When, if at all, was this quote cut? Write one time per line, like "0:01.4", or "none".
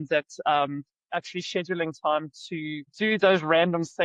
0:02.8